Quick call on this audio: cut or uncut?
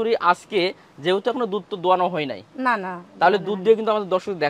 uncut